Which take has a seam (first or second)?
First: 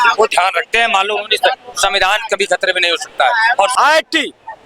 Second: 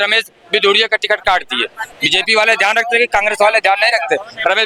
first